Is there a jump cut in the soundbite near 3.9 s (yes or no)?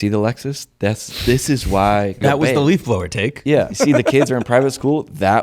yes